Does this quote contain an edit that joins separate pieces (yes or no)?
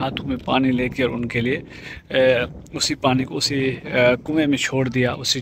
no